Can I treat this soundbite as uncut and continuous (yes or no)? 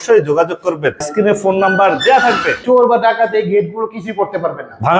no